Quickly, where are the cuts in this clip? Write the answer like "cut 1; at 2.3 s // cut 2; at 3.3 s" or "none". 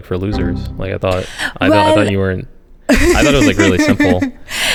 none